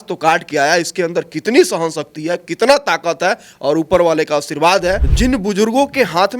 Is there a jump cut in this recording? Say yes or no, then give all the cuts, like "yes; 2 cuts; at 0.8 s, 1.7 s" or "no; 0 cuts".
yes; 1 cut; at 5.1 s